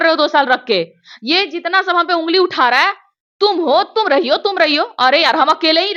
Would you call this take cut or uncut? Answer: uncut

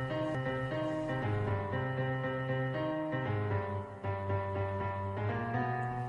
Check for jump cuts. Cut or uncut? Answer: uncut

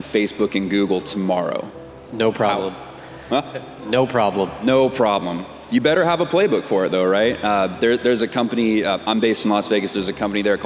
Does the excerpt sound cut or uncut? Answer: uncut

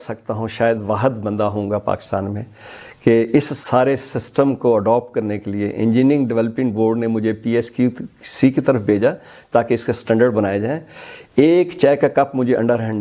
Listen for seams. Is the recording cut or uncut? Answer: uncut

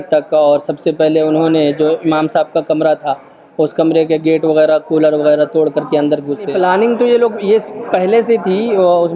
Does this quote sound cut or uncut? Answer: cut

